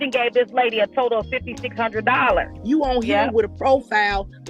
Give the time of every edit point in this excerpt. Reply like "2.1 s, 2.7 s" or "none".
2.5 s

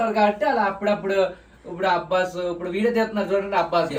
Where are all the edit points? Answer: none

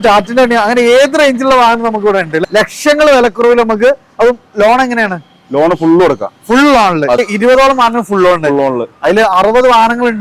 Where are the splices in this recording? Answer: 2.3 s, 7.2 s

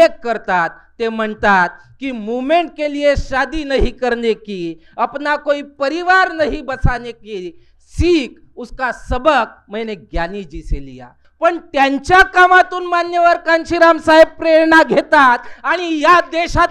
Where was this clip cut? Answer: 11.2 s

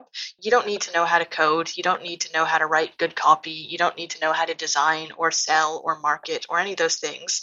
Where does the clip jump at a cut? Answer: none

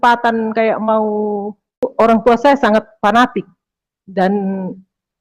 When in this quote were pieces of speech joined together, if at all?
1.8 s

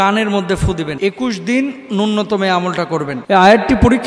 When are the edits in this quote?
0.9 s, 3.2 s

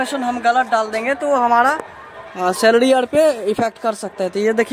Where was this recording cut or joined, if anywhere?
none

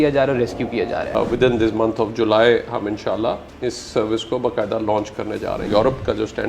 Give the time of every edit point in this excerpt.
1.1 s, 5.7 s

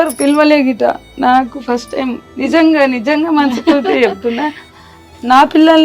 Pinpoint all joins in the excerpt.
none

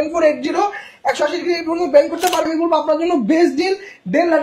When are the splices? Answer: 2.5 s

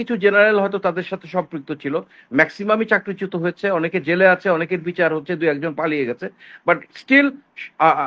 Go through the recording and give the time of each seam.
none

